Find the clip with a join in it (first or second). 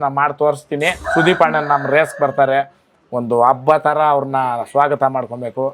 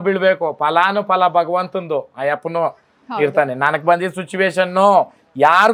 first